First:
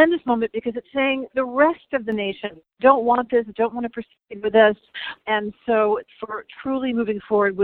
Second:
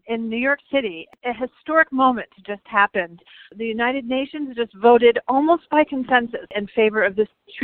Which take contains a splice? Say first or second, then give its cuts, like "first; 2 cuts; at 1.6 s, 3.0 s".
second; 2 cuts; at 1.1 s, 6.5 s